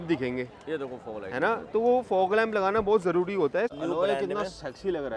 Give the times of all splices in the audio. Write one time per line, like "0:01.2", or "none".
0:03.7